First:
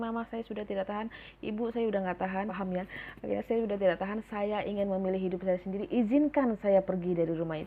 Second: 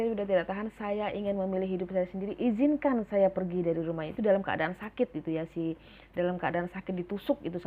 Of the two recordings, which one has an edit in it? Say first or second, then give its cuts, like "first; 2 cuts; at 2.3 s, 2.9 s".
first; 1 cut; at 2.6 s